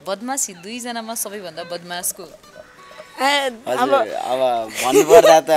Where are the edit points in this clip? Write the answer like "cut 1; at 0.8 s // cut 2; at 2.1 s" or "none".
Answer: none